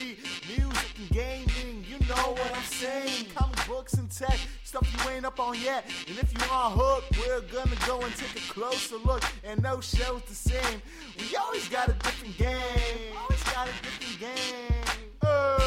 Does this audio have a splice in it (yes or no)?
no